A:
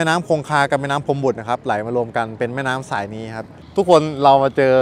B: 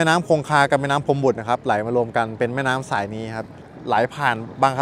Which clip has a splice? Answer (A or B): A